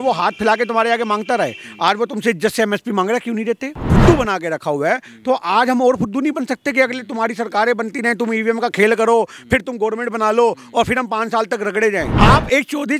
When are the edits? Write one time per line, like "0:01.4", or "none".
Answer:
0:03.8
0:12.1